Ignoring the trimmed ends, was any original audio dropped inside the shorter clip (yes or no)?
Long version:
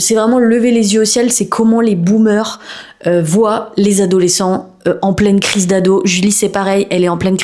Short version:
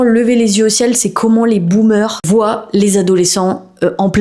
yes